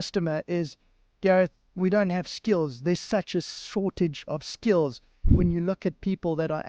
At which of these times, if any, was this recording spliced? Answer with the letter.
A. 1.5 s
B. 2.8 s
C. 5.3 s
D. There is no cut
C